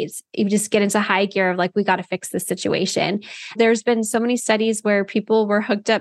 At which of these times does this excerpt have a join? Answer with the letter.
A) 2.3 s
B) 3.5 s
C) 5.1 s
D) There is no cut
B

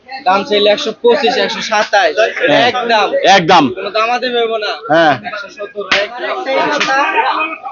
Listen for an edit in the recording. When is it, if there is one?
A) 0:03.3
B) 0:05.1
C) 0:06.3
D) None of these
C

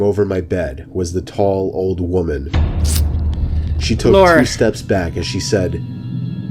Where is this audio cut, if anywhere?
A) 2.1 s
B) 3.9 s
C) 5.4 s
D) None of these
D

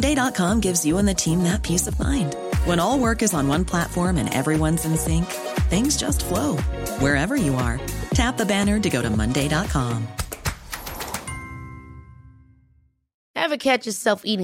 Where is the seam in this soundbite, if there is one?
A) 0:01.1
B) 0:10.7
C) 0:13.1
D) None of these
C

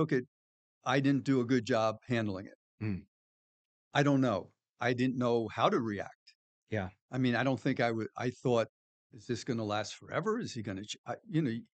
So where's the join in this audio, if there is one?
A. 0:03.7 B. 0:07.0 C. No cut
C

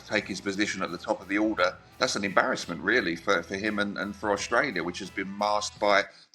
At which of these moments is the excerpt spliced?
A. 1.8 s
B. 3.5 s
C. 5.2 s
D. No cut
A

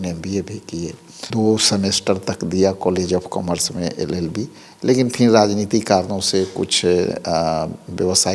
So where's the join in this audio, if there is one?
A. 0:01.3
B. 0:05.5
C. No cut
A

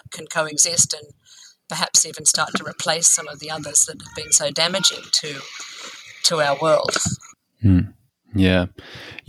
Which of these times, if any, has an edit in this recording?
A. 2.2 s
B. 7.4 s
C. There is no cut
C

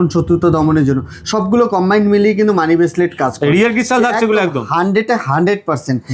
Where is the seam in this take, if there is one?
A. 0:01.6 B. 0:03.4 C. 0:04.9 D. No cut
D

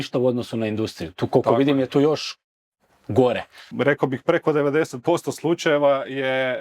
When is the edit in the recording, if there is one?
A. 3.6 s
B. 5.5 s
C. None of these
A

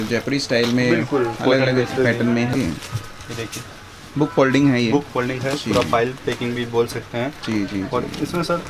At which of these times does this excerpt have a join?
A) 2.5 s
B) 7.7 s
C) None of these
A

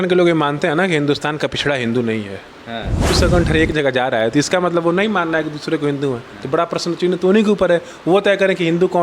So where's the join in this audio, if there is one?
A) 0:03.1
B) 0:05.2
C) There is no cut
A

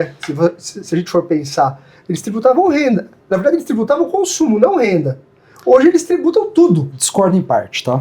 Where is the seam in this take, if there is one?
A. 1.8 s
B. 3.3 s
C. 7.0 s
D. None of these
C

